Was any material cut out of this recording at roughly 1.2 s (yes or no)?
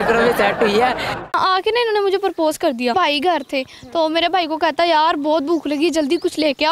yes